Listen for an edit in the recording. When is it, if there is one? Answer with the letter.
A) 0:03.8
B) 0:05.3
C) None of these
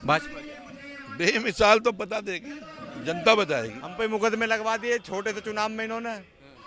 A